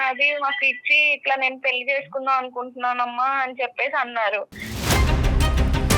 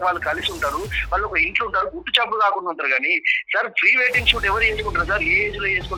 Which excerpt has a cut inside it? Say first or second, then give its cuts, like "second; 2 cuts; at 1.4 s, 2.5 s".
first; 1 cut; at 4.7 s